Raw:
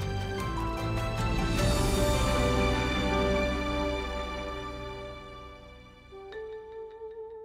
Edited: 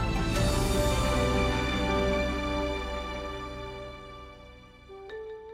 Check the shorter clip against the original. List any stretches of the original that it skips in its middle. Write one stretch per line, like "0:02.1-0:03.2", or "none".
none